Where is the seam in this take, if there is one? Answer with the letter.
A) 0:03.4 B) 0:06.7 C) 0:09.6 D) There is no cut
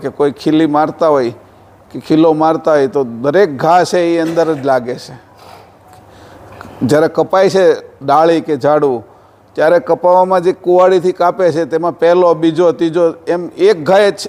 D